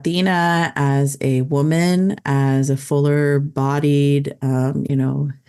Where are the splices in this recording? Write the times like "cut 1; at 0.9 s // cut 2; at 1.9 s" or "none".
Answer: none